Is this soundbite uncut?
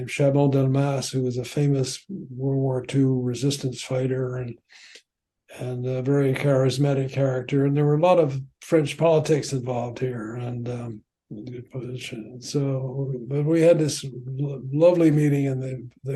yes; 0 cuts

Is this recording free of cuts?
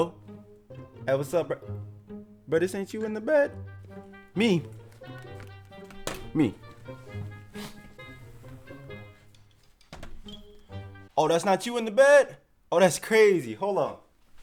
yes; 0 cuts

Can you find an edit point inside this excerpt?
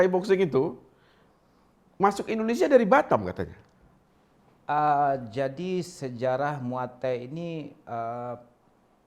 no; 0 cuts

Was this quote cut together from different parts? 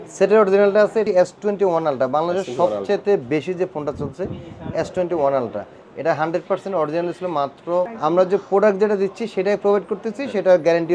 yes; 2 cuts; at 1.0 s, 7.9 s

